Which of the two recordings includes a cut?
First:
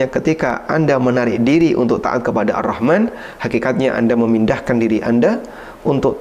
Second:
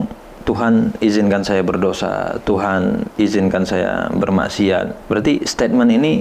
second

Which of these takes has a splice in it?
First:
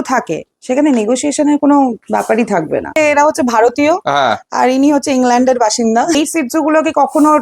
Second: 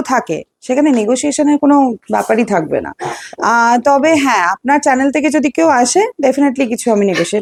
first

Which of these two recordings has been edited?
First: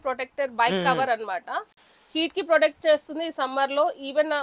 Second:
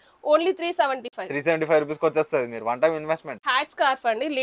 second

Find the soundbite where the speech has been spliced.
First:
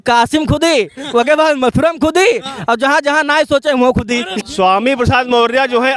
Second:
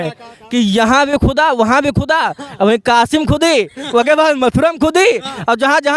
first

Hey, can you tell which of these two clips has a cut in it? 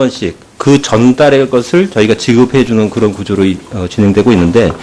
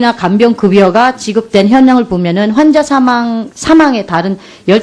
first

